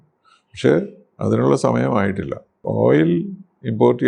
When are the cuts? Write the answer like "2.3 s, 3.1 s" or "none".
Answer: 2.5 s